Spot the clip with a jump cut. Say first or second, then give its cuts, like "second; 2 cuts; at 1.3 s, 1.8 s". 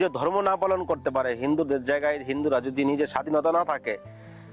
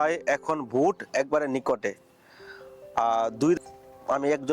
second; 1 cut; at 3.6 s